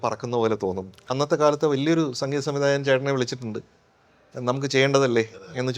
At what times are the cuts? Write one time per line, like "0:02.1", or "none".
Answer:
0:01.0